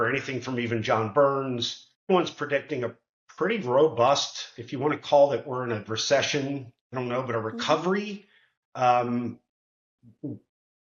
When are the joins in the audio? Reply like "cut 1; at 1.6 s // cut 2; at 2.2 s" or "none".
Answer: cut 1; at 2.1 s // cut 2; at 6.8 s